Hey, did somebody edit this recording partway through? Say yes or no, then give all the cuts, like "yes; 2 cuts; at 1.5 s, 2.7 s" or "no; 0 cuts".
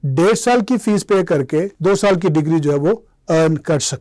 yes; 1 cut; at 1.7 s